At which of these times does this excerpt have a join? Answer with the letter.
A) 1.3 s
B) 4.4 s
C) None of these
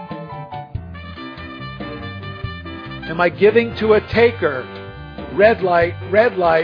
A